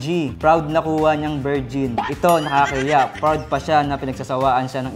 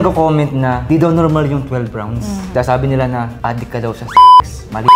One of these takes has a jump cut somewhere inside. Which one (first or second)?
second